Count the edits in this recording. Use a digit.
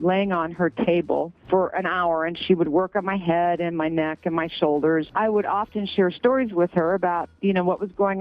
1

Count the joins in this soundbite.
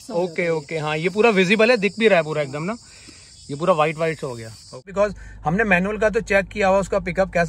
1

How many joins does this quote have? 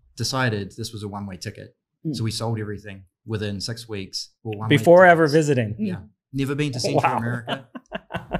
0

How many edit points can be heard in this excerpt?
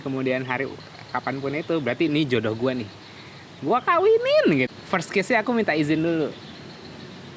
1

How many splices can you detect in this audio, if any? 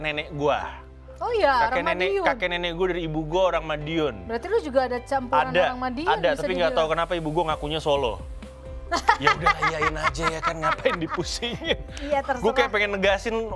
0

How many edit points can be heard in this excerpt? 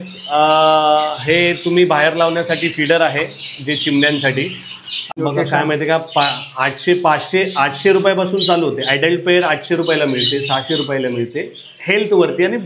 1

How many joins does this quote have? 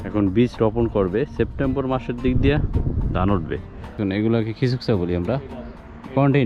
1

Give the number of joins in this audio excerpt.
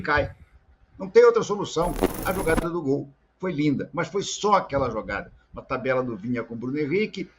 1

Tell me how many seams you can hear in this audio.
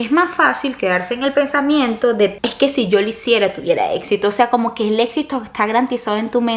0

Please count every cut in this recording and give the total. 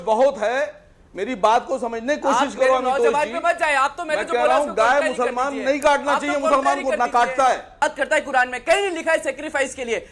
1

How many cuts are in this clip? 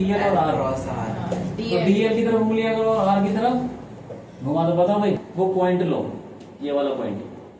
1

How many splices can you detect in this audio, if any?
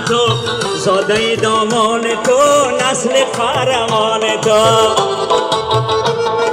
0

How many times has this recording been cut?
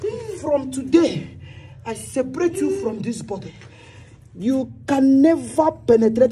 0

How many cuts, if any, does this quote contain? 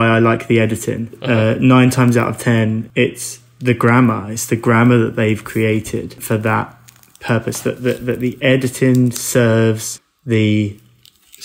3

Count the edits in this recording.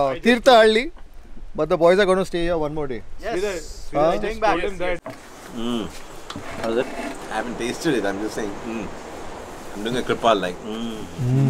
2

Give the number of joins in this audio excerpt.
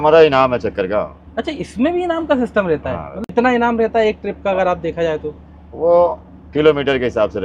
0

